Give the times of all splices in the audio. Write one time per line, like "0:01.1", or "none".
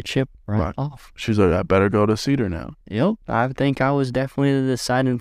0:03.0